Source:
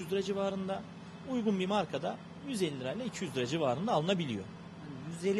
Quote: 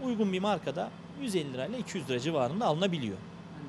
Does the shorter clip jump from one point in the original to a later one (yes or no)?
no